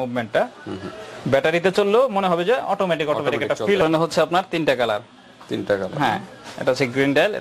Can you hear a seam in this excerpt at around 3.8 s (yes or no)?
yes